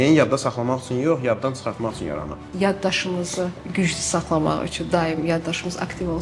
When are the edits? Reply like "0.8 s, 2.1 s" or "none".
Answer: 2.4 s